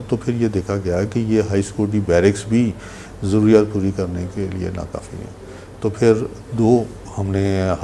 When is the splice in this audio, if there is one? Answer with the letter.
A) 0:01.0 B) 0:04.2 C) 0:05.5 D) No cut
D